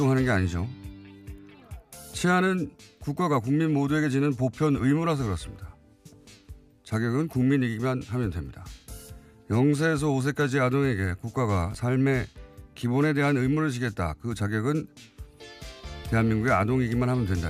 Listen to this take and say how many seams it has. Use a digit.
1